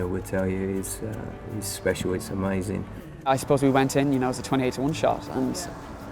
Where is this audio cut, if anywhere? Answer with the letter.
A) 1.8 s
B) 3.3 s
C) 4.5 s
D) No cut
B